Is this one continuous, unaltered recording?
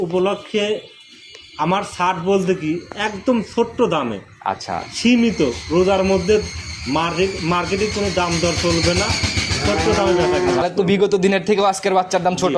no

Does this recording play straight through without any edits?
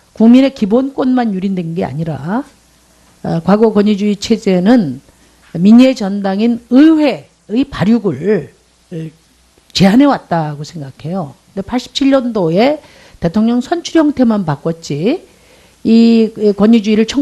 no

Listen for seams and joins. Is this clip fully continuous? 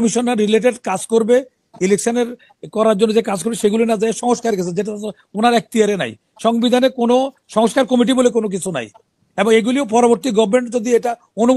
yes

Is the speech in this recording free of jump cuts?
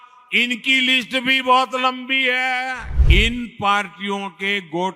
no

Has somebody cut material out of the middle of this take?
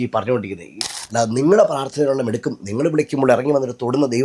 yes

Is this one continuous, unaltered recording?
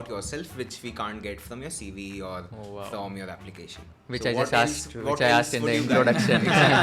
yes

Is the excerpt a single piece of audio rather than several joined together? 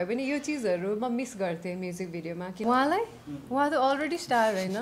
no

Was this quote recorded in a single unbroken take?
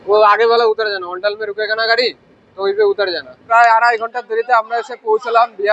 no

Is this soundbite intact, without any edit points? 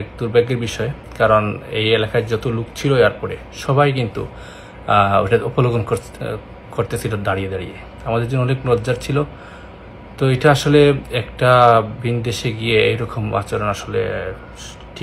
yes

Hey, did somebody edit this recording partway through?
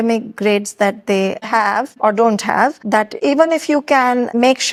no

